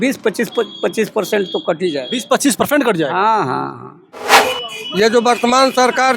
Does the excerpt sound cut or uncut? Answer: cut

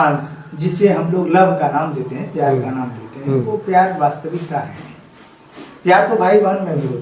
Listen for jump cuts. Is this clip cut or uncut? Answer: uncut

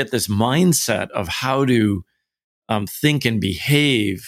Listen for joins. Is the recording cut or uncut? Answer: uncut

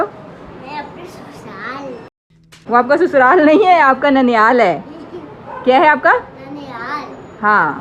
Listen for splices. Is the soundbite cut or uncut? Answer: uncut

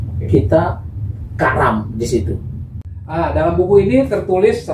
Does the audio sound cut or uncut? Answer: cut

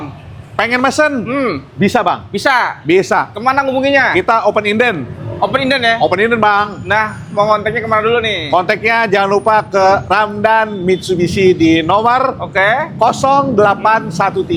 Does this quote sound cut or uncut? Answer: uncut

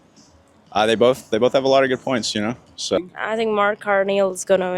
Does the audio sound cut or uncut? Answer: cut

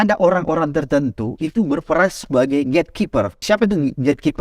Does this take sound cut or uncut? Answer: cut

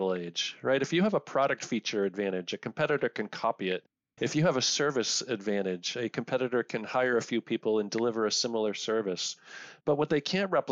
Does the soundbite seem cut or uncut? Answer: uncut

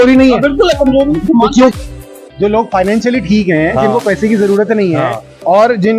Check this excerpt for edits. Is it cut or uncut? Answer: cut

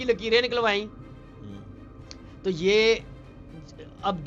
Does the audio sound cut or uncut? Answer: uncut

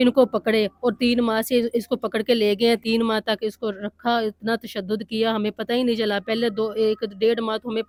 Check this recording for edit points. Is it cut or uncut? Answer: uncut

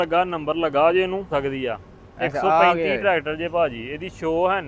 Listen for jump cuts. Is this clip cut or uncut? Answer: cut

